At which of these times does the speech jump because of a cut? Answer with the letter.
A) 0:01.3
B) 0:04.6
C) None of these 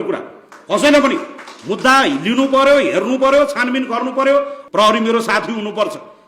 B